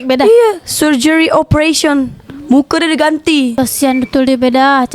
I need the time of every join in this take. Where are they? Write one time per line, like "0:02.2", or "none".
0:03.5